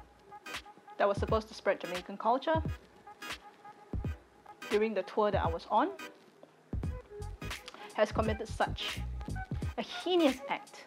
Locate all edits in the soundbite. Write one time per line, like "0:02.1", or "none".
0:02.6
0:04.7
0:06.0
0:07.5